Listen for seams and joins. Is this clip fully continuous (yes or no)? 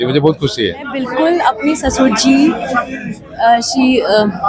no